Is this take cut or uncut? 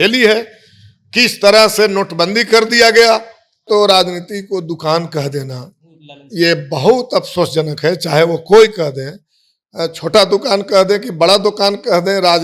cut